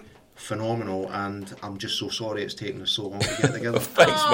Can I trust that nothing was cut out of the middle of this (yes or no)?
yes